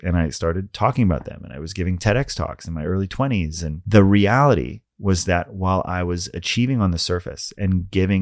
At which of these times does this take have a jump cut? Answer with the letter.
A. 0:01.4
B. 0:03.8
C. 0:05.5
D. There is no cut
B